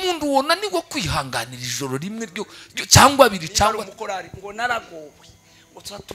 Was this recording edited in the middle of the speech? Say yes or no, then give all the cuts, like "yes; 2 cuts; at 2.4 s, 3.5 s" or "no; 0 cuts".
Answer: yes; 1 cut; at 3.9 s